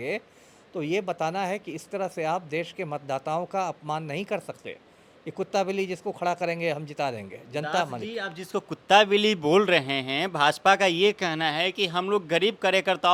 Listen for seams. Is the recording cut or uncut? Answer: uncut